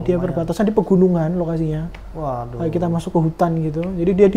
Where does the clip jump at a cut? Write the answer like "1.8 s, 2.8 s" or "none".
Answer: none